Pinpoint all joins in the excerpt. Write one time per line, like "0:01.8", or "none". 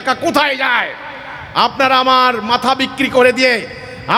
none